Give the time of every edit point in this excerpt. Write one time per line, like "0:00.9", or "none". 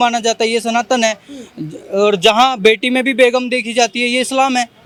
none